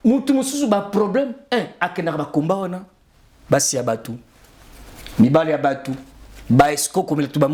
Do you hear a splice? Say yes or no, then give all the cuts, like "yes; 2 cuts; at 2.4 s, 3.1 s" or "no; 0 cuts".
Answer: no; 0 cuts